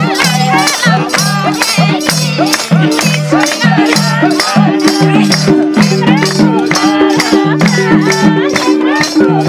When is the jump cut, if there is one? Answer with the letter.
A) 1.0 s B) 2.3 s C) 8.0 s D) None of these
D